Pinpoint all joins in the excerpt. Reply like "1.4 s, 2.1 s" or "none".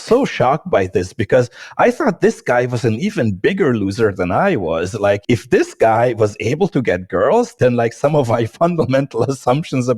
5.2 s, 7.5 s